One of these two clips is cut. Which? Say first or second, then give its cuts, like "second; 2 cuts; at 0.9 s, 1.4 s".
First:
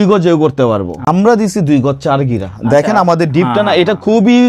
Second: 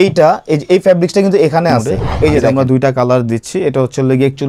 second; 1 cut; at 2.5 s